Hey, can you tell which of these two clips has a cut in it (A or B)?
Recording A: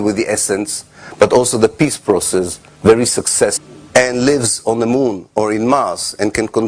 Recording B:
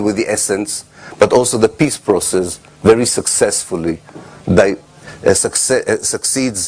B